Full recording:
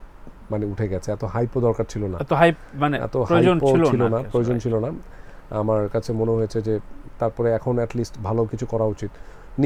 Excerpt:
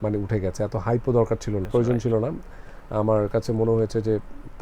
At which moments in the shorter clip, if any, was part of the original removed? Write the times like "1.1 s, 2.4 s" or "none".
1.7 s